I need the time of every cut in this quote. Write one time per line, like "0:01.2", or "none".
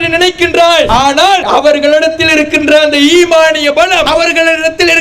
0:01.1
0:04.1

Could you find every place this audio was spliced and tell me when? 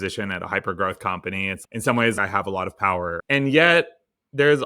0:03.2

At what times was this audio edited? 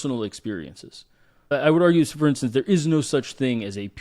0:01.5

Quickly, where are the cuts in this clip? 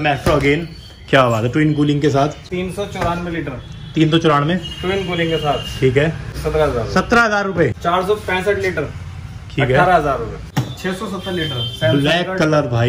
0:02.5
0:06.4
0:07.8
0:10.4

